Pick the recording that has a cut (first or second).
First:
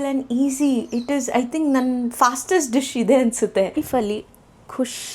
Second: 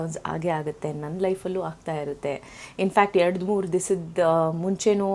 first